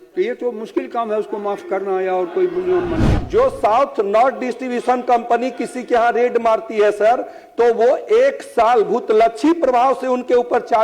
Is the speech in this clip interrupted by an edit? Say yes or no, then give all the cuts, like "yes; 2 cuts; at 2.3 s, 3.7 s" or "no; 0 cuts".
yes; 1 cut; at 3.2 s